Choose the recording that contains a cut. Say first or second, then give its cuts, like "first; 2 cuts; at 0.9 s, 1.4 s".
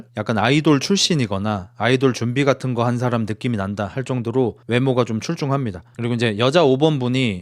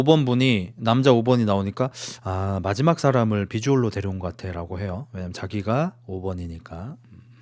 first; 1 cut; at 5.8 s